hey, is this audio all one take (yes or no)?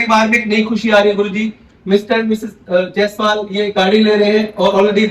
yes